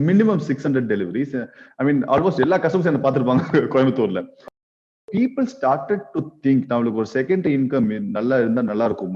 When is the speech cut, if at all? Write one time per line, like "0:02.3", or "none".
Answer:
0:04.6

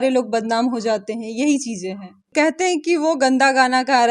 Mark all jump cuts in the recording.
0:02.3

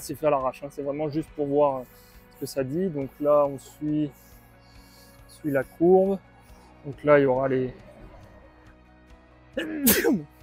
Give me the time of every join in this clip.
none

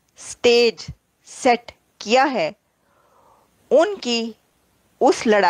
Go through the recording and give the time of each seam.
none

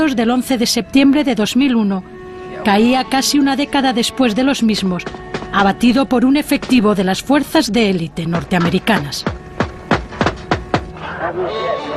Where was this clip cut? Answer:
0:05.3

